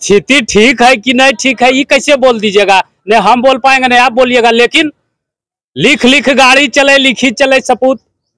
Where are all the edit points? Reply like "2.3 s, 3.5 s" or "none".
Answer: none